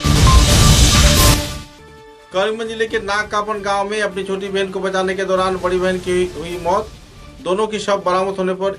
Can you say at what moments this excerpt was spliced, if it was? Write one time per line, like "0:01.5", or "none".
none